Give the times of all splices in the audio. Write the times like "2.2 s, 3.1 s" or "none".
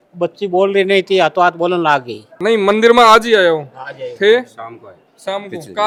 none

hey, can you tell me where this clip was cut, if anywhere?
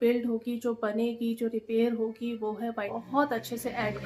2.9 s

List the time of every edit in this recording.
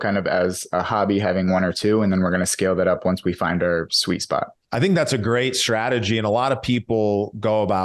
4.6 s

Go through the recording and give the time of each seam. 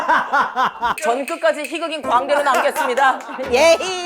1.0 s

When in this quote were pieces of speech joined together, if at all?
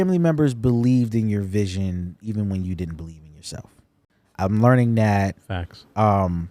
none

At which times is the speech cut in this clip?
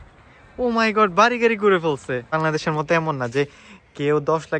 2.3 s

